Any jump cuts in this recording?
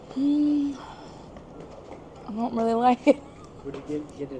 no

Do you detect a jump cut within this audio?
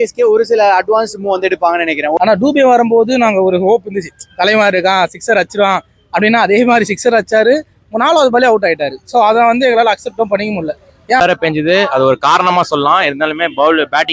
yes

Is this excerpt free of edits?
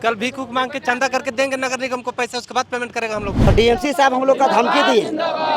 no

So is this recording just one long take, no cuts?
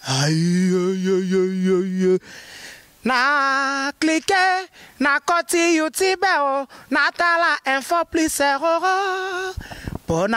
yes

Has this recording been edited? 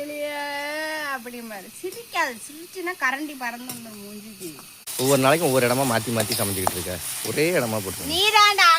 yes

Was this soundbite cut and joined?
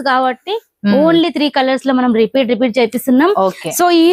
no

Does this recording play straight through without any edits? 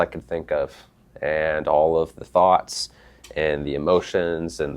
yes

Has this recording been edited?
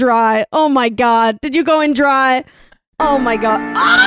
no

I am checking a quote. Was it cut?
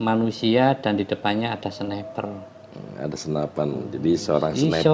no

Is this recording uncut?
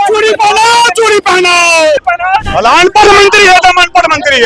no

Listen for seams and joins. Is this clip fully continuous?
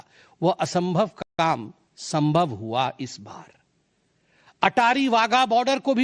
yes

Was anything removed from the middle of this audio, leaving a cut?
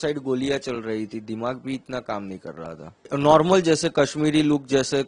yes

